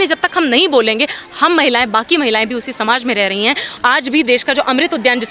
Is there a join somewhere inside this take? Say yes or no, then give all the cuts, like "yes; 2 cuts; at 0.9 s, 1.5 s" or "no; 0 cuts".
yes; 1 cut; at 3.7 s